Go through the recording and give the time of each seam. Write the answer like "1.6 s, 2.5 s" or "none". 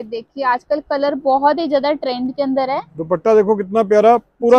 none